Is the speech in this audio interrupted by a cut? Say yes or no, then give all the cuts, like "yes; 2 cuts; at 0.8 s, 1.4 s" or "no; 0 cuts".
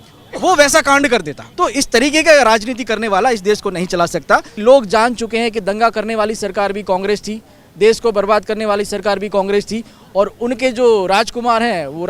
yes; 2 cuts; at 1.4 s, 4.5 s